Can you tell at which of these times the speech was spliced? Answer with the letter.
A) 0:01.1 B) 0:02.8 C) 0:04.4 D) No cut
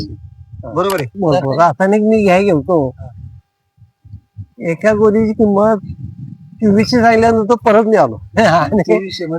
A